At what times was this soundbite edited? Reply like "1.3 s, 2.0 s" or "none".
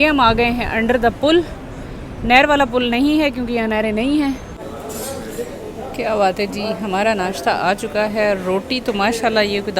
4.5 s